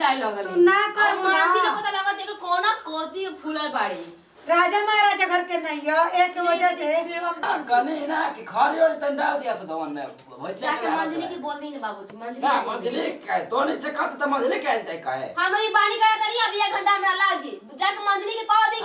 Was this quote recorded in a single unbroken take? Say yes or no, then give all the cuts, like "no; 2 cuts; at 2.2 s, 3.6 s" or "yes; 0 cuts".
no; 1 cut; at 7.4 s